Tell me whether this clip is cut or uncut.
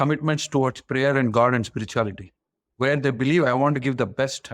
uncut